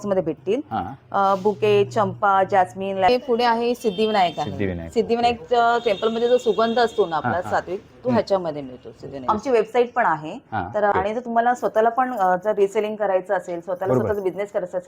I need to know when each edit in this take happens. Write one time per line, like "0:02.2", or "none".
0:03.1
0:09.3
0:10.9